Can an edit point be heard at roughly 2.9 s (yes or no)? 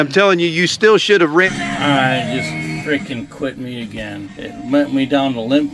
no